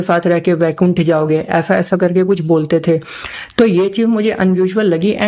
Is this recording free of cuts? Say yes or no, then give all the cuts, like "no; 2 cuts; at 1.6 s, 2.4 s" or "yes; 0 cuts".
yes; 0 cuts